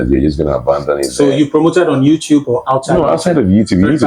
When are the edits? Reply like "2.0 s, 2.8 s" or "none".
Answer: none